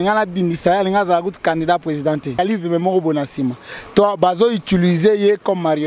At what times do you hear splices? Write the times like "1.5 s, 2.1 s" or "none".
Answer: 2.4 s